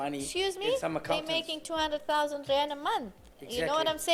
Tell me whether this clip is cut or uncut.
uncut